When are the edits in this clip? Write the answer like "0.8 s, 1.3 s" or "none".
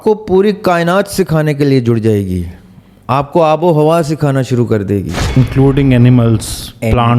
5.4 s